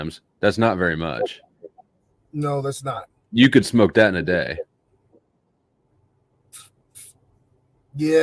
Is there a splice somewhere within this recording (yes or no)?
no